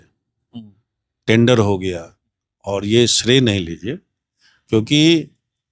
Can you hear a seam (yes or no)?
no